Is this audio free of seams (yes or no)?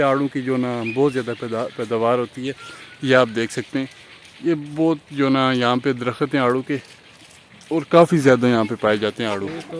yes